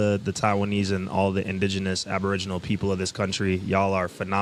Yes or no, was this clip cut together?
no